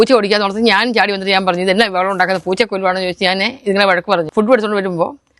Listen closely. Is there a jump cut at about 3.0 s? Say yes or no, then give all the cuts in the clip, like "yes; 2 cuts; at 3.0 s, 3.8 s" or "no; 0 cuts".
no; 1 cut; at 4.3 s